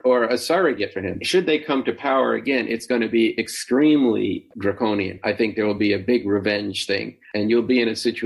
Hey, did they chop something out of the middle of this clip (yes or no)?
yes